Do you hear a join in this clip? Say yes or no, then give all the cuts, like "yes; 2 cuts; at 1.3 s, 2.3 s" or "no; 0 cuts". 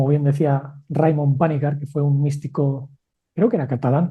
no; 0 cuts